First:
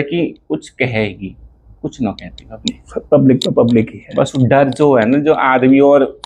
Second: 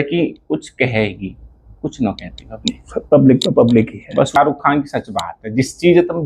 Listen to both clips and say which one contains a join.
second; 1 cut; at 4.3 s

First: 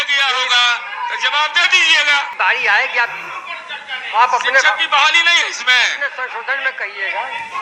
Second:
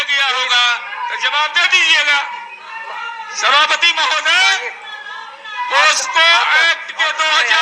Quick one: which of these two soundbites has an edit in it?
first; 1 cut; at 2.3 s

